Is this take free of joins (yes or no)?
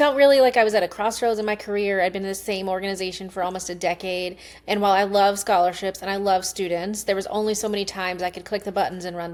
yes